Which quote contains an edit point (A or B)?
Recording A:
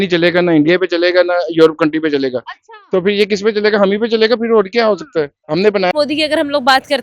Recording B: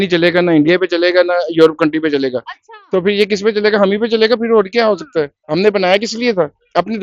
A